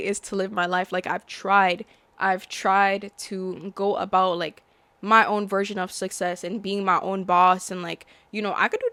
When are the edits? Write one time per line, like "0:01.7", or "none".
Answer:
none